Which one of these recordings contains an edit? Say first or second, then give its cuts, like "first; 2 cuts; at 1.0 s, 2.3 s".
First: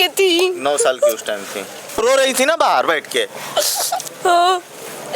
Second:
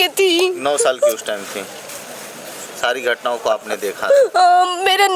first; 1 cut; at 2.0 s